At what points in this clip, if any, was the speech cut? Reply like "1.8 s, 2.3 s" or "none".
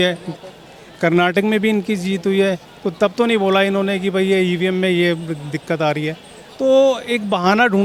none